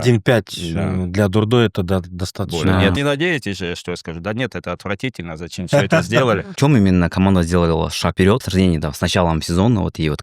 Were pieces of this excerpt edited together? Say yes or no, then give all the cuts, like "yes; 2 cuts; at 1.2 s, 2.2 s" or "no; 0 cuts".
yes; 3 cuts; at 3.0 s, 6.5 s, 8.4 s